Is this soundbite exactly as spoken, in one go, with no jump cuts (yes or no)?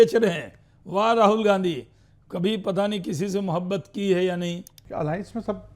no